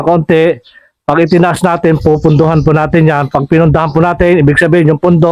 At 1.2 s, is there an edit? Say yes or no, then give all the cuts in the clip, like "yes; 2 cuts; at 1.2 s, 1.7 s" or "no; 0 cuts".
no; 0 cuts